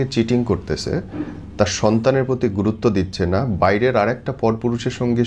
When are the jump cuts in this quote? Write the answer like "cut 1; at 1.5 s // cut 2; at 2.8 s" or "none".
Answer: none